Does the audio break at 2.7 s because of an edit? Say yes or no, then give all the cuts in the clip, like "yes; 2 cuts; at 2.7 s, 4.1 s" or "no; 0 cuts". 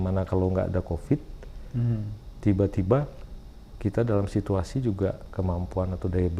no; 0 cuts